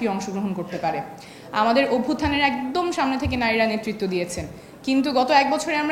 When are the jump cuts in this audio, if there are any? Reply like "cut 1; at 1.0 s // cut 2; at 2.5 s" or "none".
none